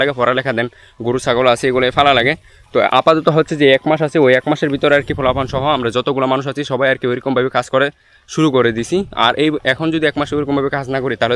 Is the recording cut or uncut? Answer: uncut